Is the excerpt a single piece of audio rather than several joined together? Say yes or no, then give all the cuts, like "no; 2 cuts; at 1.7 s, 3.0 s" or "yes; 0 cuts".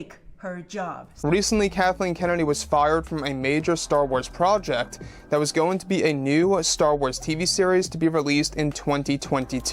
no; 1 cut; at 1.0 s